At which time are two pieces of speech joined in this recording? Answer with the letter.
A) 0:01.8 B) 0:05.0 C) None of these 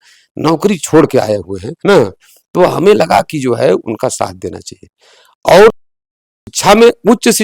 C